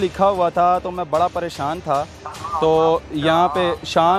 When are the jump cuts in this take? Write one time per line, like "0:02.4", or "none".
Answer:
none